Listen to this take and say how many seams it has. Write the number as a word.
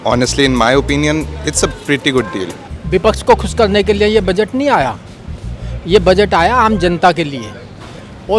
one